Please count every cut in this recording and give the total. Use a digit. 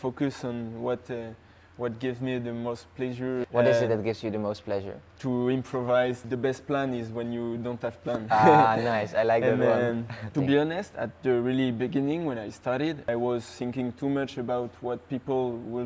4